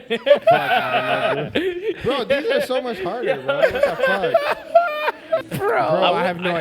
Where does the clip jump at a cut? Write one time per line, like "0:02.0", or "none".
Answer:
0:05.4